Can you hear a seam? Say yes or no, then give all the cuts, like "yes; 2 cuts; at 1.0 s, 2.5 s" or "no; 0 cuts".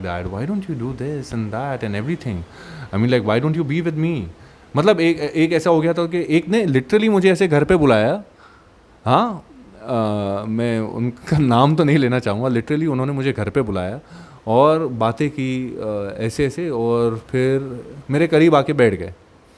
no; 0 cuts